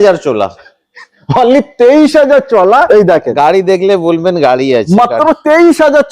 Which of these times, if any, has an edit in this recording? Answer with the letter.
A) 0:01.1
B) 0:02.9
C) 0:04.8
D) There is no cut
B